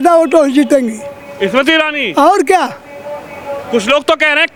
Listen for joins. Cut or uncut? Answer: uncut